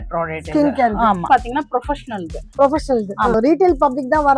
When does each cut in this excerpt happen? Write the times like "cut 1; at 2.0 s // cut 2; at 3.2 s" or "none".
cut 1; at 1.3 s // cut 2; at 3.3 s